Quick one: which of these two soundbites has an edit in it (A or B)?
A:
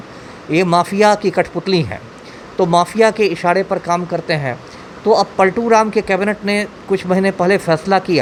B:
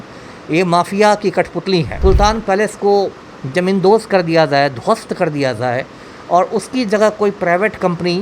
B